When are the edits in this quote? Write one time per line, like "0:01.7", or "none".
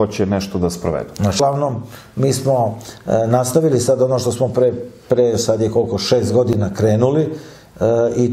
0:01.4